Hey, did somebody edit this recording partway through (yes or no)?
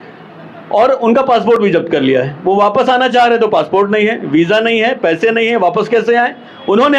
no